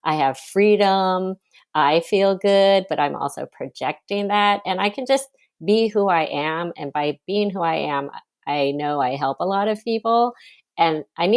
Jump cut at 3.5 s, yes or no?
no